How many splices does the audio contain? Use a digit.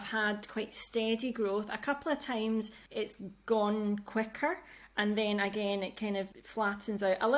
2